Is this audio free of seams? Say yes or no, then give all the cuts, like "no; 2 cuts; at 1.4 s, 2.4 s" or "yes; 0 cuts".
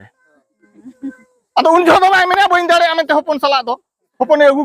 yes; 0 cuts